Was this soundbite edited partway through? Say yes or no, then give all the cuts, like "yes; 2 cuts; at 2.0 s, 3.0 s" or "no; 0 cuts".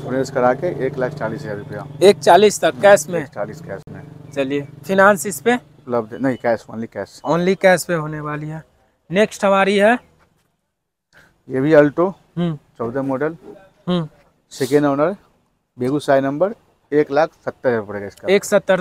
no; 0 cuts